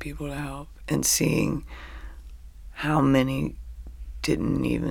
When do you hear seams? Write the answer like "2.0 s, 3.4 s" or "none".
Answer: none